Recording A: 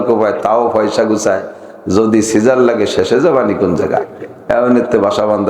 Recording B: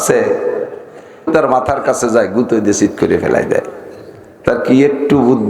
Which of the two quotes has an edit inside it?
B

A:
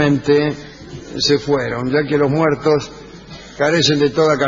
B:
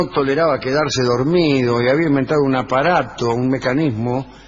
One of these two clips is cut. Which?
B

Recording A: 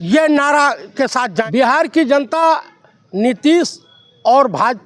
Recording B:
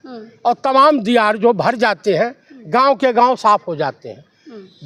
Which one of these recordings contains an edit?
A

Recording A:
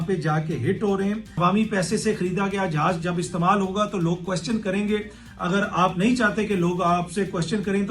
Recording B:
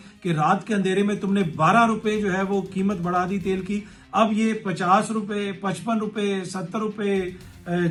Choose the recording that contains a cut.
A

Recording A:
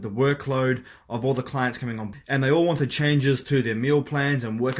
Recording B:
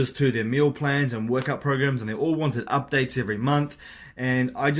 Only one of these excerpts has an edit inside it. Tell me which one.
A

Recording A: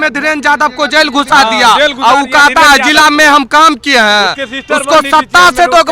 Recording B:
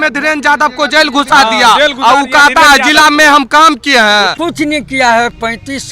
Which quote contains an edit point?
B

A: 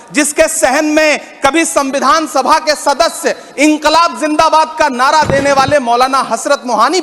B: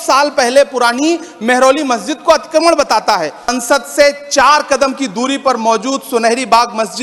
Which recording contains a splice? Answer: B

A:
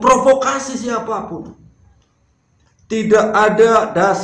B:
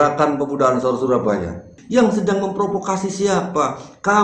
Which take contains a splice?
B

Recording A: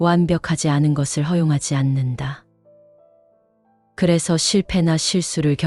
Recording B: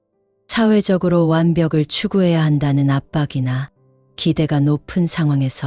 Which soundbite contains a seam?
A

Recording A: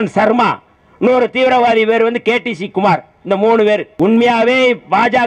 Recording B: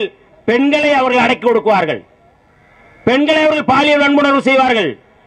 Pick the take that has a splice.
A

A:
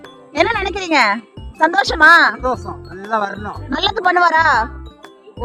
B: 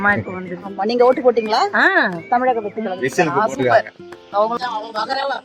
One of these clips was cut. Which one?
B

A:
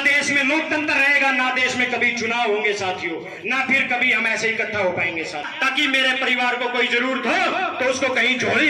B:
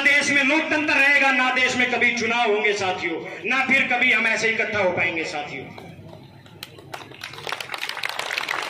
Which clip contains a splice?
A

